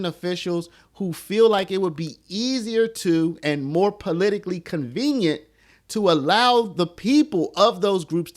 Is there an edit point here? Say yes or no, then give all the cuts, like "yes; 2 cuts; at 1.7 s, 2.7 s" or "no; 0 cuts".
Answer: no; 0 cuts